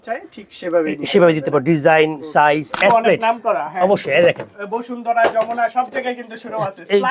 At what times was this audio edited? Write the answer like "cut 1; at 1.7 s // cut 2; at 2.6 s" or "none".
cut 1; at 2.7 s